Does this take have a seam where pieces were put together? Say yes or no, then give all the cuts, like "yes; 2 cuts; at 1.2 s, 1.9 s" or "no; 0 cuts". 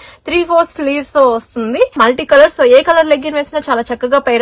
yes; 1 cut; at 2.0 s